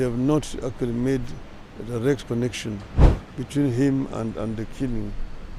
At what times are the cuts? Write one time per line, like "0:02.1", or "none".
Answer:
none